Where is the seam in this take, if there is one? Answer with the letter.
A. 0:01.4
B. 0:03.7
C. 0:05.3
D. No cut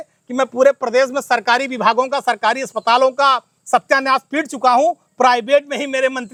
D